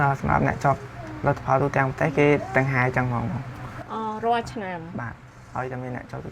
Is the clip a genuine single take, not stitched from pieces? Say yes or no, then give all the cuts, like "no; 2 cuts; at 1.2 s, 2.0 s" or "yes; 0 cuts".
yes; 0 cuts